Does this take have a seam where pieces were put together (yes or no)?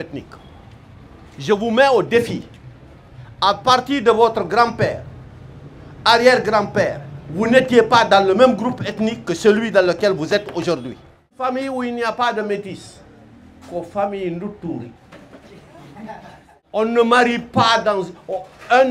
yes